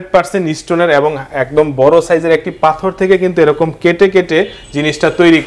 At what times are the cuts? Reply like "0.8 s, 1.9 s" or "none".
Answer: none